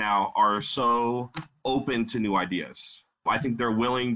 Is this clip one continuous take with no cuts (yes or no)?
no